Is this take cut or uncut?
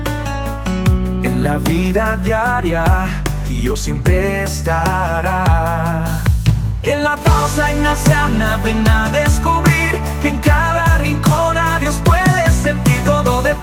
uncut